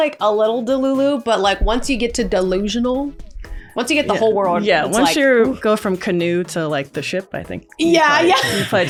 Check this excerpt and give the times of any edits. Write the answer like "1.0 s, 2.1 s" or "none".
none